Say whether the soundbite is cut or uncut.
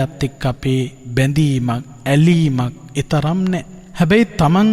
cut